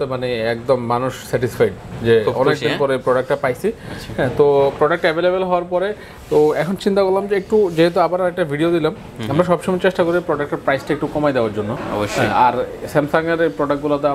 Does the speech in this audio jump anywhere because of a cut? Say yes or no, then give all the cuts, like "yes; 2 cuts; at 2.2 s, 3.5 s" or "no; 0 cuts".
no; 0 cuts